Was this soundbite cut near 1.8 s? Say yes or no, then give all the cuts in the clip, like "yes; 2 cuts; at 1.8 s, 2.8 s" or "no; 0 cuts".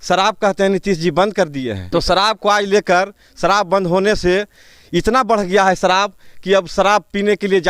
yes; 1 cut; at 1.8 s